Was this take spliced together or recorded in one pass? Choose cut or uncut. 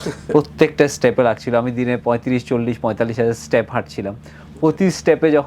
uncut